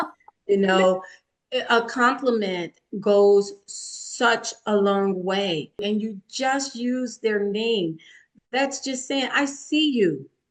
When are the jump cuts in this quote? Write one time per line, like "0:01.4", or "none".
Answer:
0:05.8